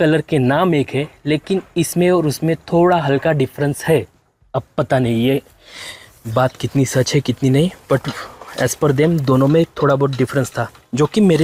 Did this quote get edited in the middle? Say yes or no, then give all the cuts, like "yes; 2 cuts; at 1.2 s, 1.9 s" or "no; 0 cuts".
no; 0 cuts